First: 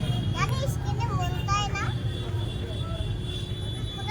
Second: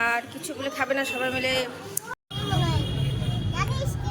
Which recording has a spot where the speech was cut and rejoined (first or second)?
second